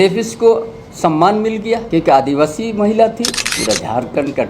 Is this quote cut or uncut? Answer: cut